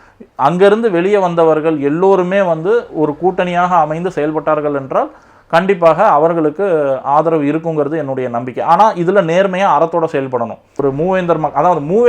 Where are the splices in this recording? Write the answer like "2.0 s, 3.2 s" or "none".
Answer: 10.8 s